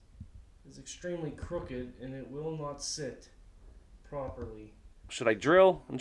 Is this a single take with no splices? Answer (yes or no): no